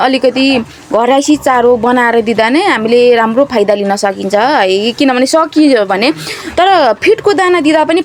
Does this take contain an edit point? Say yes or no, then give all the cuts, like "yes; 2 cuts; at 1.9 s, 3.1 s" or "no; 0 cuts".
no; 0 cuts